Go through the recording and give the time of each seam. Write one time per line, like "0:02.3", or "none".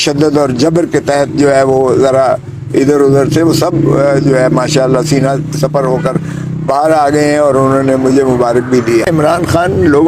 0:09.1